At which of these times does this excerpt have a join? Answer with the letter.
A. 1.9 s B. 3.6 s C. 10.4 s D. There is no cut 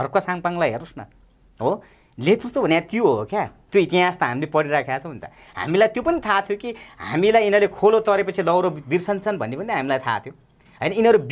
B